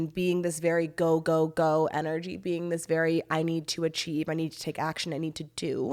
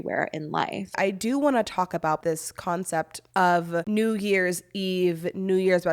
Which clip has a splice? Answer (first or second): second